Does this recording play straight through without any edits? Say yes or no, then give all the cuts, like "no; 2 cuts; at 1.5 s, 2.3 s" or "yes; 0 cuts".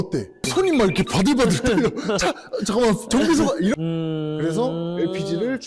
no; 1 cut; at 3.7 s